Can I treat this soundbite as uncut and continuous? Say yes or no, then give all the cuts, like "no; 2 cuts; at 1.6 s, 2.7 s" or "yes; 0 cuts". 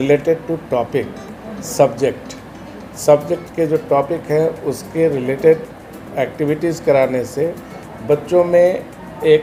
yes; 0 cuts